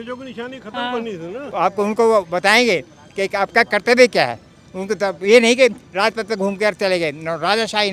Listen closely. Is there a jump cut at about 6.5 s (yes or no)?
no